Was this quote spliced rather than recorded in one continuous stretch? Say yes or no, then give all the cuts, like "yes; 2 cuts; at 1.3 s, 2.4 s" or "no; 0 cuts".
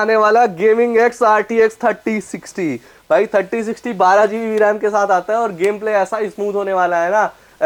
no; 0 cuts